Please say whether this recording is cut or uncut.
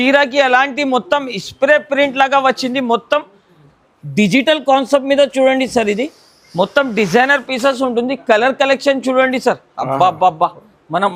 uncut